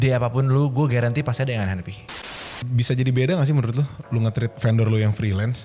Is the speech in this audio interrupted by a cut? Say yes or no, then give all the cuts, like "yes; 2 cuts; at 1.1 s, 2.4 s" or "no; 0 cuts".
yes; 2 cuts; at 2.0 s, 4.5 s